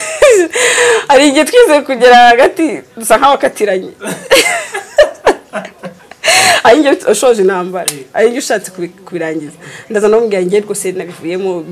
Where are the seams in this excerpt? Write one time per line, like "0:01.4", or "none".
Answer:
none